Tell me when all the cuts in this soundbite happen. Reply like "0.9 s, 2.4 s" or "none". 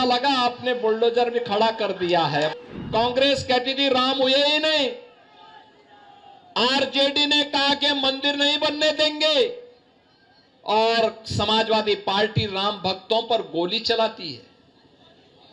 2.5 s